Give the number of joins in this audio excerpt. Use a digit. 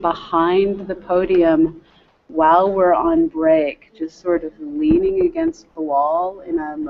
1